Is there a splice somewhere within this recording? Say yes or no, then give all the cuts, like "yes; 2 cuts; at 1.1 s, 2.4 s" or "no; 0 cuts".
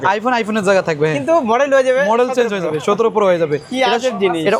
no; 0 cuts